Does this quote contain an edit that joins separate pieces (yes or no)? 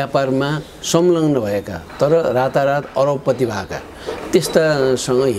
no